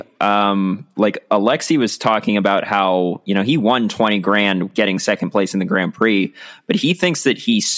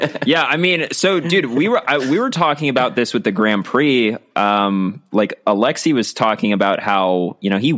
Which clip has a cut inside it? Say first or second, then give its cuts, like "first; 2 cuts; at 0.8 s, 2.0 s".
first; 1 cut; at 4.7 s